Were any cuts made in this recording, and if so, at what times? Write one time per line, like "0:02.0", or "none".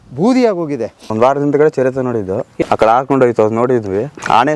0:01.1
0:02.5